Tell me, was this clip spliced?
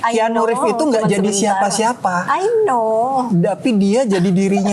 no; 0 cuts

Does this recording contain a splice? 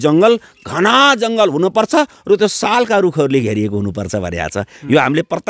no; 0 cuts

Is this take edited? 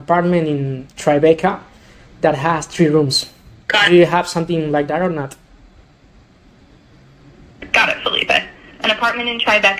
no; 0 cuts

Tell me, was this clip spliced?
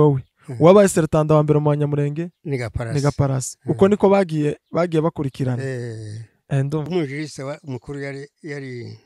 yes; 1 cut; at 6.9 s

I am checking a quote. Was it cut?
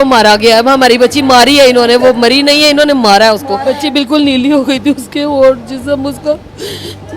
yes; 1 cut; at 3.7 s

